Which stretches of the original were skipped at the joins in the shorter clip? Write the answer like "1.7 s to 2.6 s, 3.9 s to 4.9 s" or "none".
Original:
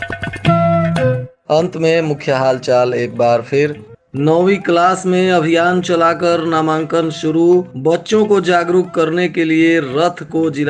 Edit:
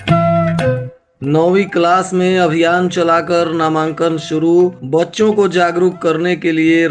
1.3 s to 3.9 s